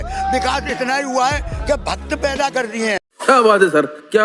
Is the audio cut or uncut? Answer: cut